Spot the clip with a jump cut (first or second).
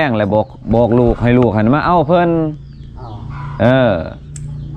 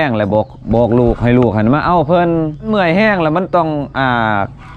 second